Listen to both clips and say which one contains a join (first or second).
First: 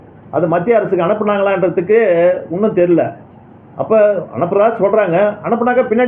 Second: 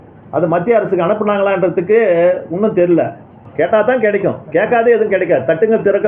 second